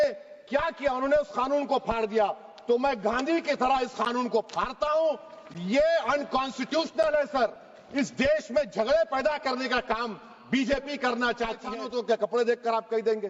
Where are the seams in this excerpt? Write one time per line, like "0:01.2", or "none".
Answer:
0:11.7